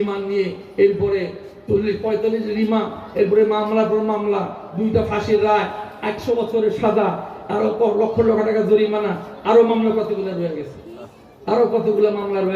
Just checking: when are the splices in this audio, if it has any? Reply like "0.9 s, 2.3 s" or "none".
none